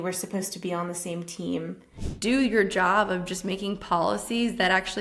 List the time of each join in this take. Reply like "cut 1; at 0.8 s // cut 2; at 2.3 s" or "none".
cut 1; at 2.0 s